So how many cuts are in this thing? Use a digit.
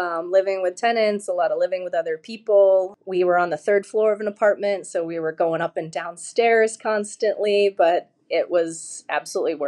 0